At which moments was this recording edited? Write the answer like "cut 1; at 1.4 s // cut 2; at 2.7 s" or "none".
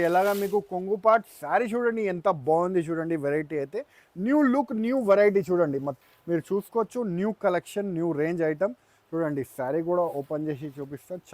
cut 1; at 5.9 s